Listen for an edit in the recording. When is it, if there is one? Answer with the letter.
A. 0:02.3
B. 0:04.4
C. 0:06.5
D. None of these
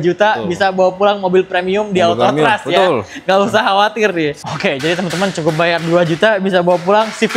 B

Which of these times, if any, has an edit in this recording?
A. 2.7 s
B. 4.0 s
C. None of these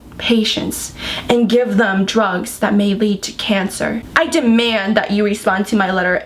B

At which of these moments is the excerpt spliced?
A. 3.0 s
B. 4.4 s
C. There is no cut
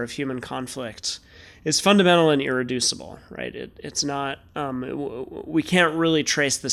C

